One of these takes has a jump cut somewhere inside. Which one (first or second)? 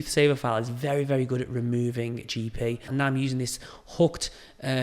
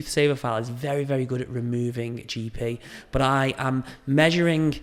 first